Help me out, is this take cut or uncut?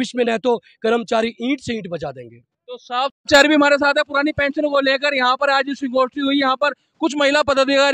uncut